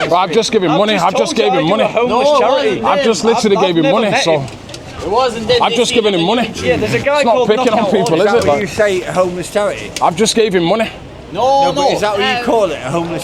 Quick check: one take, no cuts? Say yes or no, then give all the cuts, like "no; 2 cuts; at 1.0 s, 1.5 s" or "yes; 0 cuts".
yes; 0 cuts